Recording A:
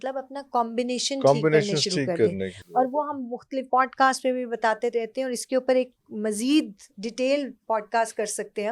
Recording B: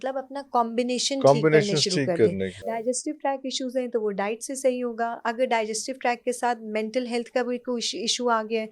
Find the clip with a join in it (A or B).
B